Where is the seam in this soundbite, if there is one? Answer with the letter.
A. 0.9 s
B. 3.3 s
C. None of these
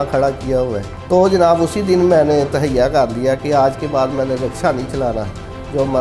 A